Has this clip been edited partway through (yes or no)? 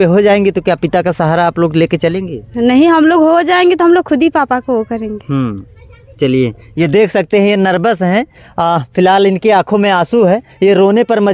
no